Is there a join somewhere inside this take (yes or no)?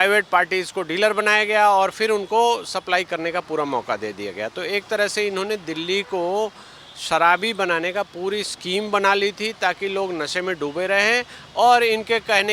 no